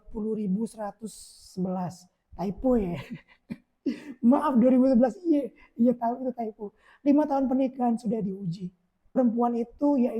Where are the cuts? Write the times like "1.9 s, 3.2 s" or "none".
9.1 s